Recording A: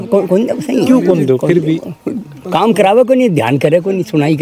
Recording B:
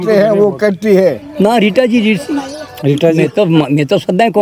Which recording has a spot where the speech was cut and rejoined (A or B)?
B